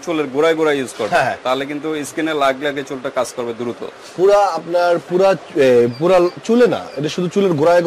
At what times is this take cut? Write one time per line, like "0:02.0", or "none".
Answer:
none